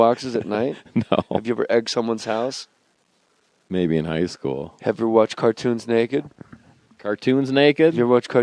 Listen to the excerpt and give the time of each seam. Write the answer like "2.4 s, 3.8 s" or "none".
4.5 s